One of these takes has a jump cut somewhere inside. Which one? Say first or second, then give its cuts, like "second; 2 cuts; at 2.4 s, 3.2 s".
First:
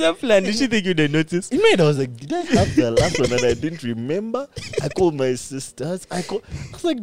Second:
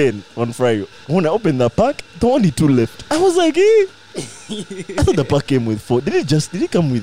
second; 2 cuts; at 0.9 s, 3.0 s